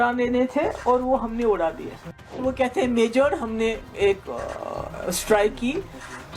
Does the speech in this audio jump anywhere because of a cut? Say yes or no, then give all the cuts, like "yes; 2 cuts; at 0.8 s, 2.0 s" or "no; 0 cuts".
yes; 1 cut; at 2.3 s